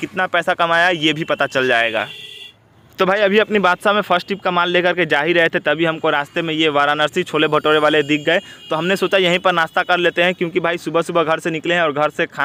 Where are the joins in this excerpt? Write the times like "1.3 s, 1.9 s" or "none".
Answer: none